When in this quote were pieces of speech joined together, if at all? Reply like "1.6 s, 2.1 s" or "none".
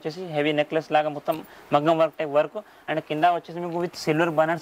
none

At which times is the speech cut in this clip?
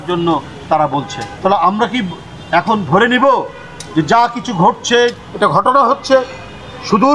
1.2 s, 5.1 s

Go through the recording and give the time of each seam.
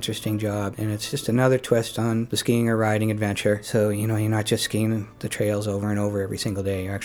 1.0 s, 2.3 s, 3.6 s

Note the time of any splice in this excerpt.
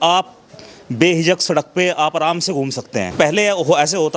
3.1 s

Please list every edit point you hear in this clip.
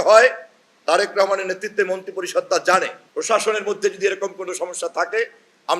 3.0 s

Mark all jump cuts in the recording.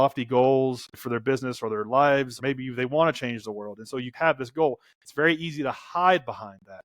0.9 s, 2.3 s

